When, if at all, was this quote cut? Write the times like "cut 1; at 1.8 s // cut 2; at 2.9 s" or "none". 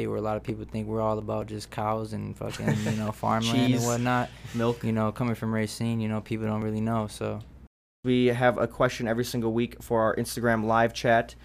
cut 1; at 8.0 s